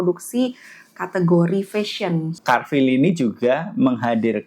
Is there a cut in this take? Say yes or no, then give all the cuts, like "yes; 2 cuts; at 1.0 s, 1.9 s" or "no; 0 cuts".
yes; 1 cut; at 2.4 s